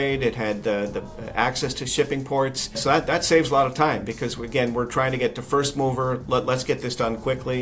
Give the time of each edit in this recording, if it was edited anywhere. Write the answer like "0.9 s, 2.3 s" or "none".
2.8 s